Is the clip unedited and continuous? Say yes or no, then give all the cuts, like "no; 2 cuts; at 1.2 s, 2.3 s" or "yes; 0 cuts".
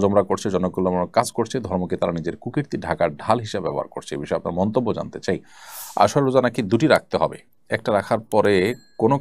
no; 1 cut; at 5.4 s